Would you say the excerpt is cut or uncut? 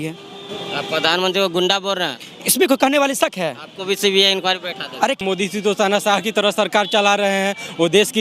cut